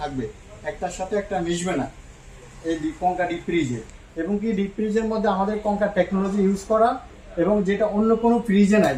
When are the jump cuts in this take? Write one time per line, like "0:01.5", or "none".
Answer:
none